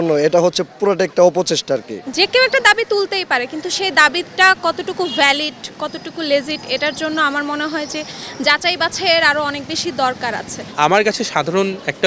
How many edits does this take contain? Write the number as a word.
two